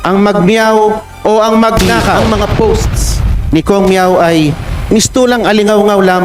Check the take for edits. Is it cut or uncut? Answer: cut